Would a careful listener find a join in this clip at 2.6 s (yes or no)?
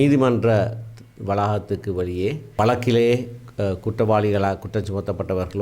yes